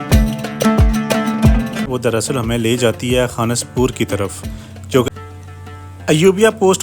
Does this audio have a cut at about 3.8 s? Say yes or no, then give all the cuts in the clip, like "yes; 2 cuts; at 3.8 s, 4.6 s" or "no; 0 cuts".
no; 2 cuts; at 1.9 s, 5.1 s